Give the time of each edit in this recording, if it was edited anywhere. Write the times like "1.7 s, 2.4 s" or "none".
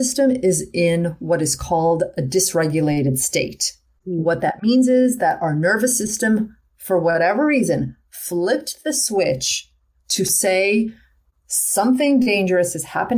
none